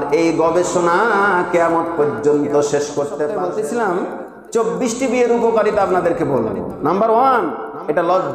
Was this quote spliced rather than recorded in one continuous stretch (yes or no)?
yes